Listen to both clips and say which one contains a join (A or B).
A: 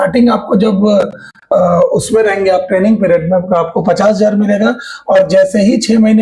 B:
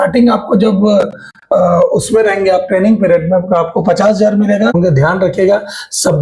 B